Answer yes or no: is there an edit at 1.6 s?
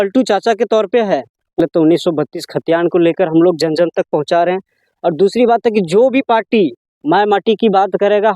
yes